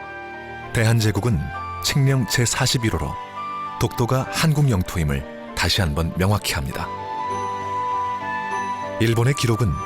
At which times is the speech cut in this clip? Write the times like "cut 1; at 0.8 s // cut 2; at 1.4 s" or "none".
cut 1; at 1.1 s